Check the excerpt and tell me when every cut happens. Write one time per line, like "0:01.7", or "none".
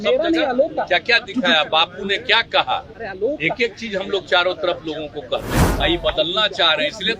0:05.7